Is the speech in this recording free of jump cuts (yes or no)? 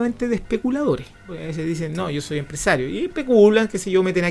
no